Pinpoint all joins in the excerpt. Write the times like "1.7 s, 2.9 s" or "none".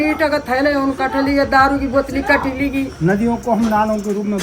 2.9 s